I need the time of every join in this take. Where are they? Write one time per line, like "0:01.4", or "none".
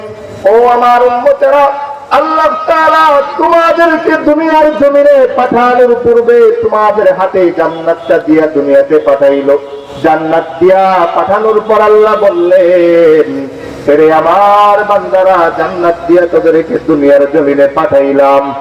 none